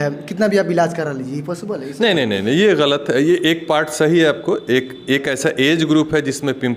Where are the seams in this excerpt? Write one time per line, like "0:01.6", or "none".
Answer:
none